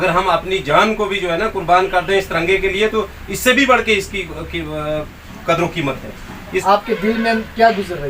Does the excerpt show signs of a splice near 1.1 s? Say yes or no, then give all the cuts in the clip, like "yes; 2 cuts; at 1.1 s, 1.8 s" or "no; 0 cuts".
no; 1 cut; at 6.6 s